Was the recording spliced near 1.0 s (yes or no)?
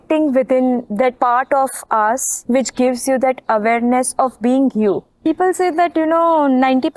yes